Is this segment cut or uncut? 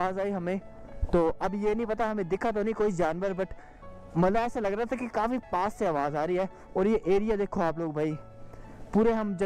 uncut